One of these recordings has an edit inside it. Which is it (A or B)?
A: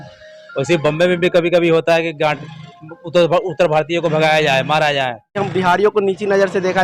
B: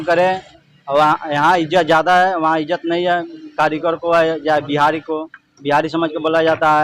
A